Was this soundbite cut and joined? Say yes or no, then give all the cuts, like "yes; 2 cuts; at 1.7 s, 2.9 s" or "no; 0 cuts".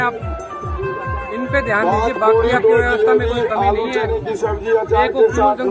no; 0 cuts